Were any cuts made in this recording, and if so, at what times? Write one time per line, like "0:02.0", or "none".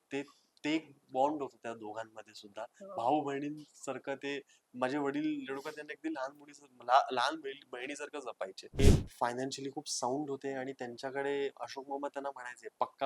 0:08.8